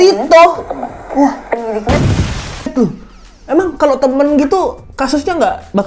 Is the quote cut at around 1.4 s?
no; 1 cut; at 2.7 s

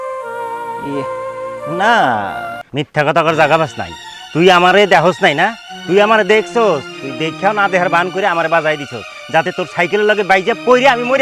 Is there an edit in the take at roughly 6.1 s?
no; 1 cut; at 2.6 s

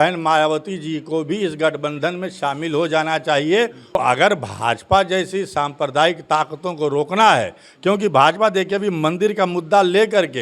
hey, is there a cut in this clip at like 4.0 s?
yes; 1 cut; at 4.0 s

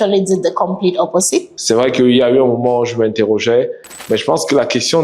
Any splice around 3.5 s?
no; 1 cut; at 1.5 s

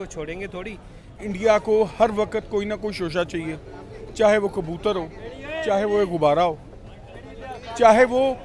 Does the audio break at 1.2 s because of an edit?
yes; 1 cut; at 1.2 s

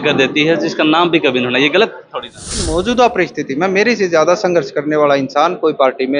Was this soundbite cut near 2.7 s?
yes; 1 cut; at 2.7 s

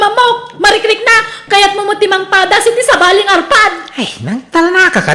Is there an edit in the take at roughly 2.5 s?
no; 1 cut; at 1.3 s

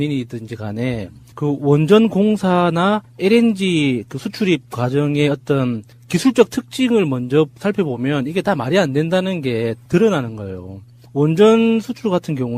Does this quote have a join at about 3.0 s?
yes; 1 cut; at 3.0 s

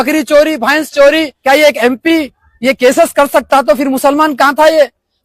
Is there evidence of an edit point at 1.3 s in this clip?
yes; 1 cut; at 1.3 s

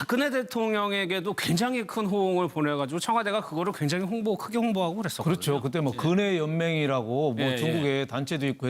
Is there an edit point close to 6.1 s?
no; 1 cut; at 7.5 s

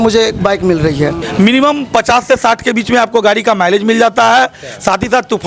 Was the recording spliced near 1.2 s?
yes; 1 cut; at 1.2 s

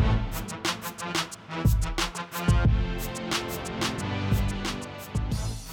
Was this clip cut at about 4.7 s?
yes; 2 cuts; at 2.9 s, 4.7 s

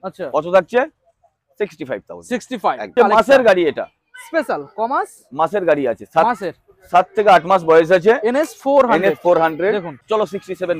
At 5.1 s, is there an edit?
no; 2 cuts; at 2.9 s, 9.9 s

